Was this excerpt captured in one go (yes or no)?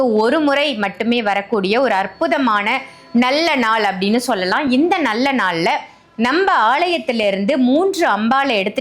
yes